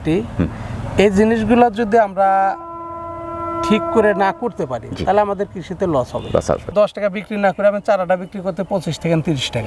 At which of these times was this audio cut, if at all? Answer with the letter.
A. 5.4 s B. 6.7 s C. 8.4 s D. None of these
B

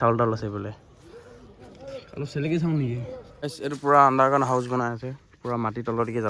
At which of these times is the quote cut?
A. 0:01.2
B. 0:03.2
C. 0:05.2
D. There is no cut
B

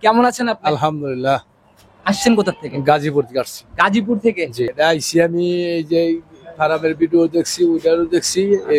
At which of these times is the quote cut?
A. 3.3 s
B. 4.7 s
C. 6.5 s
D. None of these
B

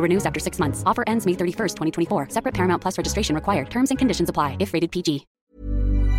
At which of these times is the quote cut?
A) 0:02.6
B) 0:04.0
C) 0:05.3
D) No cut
C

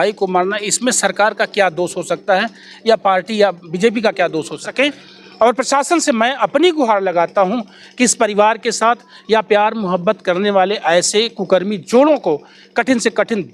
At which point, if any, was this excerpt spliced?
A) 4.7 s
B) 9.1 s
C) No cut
A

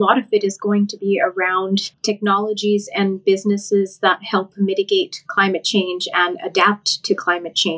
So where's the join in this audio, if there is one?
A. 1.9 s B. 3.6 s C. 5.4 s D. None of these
A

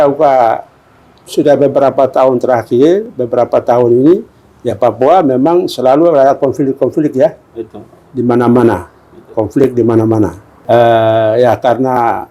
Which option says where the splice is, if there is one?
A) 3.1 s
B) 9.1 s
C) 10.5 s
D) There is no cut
C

